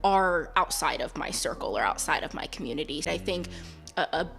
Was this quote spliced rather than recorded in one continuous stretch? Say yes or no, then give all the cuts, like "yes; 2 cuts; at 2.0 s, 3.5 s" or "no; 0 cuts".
yes; 1 cut; at 3.1 s